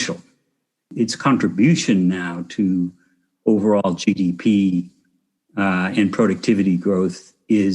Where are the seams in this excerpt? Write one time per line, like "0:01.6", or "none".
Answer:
0:00.9

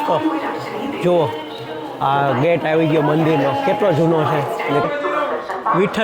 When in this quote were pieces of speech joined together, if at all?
0:04.8

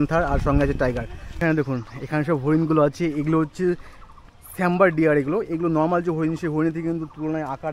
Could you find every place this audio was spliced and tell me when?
0:01.4

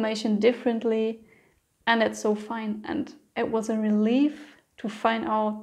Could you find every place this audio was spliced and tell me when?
none

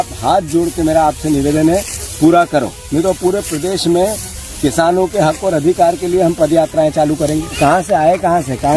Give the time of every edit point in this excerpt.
0:07.5

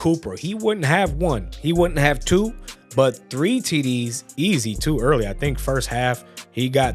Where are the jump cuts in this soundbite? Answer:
none

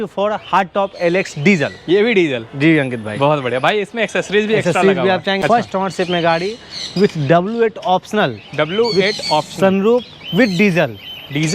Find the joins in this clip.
0:05.4

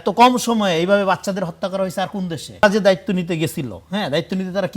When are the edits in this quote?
0:02.6

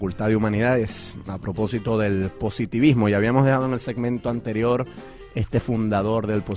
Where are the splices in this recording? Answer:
0:03.3

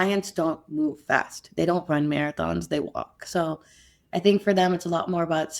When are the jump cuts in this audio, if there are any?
none

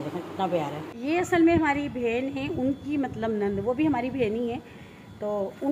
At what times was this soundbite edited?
0:00.9

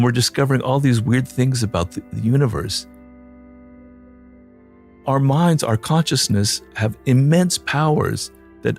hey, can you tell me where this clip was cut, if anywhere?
none

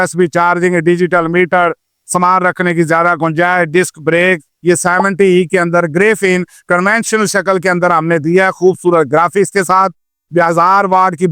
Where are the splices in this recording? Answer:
0:04.5

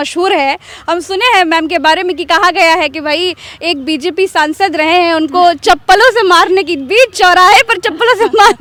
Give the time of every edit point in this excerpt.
none

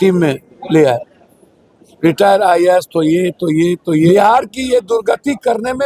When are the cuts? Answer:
0:04.1

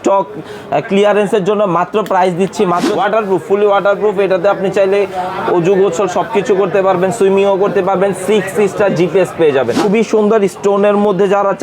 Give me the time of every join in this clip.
0:02.9
0:09.8

